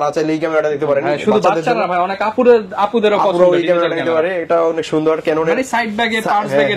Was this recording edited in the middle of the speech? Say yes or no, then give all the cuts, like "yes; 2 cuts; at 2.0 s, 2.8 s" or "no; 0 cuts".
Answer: no; 0 cuts